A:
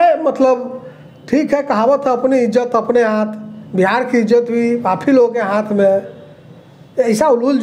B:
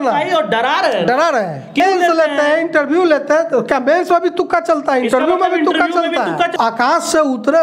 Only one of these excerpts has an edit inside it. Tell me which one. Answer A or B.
B